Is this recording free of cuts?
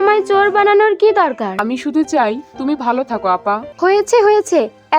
no; 2 cuts; at 1.6 s, 3.7 s

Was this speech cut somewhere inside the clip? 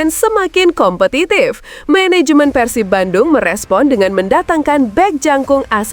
no; 0 cuts

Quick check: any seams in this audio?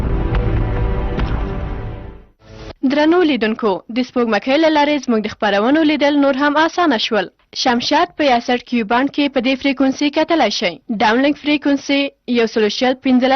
yes; 1 cut; at 2.6 s

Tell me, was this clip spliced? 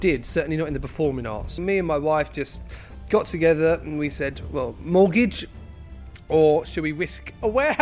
yes; 1 cut; at 1.6 s

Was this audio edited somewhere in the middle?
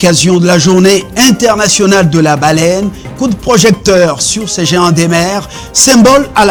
no; 0 cuts

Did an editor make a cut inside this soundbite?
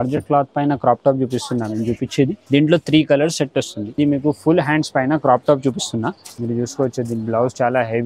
yes; 3 cuts; at 2.4 s, 3.8 s, 6.3 s

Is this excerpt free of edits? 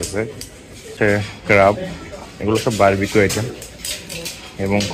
no; 1 cut; at 0.9 s

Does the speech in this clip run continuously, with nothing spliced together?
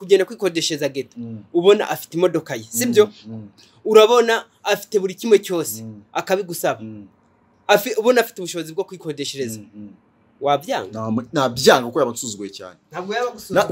yes; 0 cuts

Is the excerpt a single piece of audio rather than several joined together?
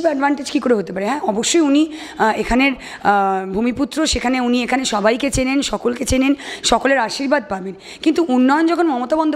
yes; 0 cuts

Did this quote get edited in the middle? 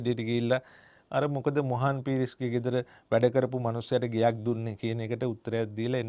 no; 0 cuts

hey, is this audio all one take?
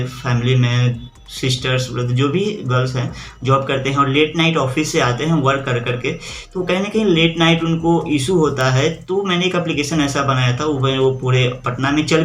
yes; 0 cuts

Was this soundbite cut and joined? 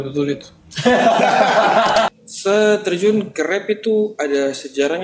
yes; 1 cut; at 2.1 s

